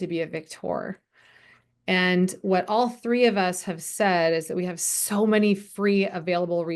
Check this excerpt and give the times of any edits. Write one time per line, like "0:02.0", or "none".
none